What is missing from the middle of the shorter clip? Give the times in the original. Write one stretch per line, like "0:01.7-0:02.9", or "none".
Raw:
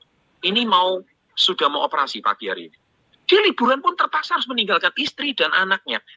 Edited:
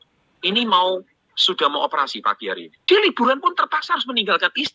0:02.7-0:03.1